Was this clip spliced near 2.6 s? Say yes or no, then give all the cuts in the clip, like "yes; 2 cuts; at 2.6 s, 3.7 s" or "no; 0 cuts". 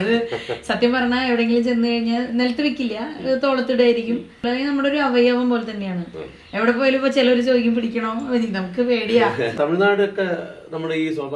no; 2 cuts; at 4.5 s, 9.5 s